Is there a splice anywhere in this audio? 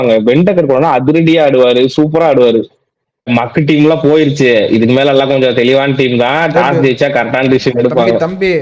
yes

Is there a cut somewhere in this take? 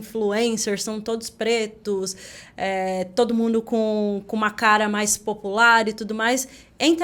no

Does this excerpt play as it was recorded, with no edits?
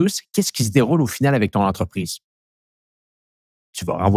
yes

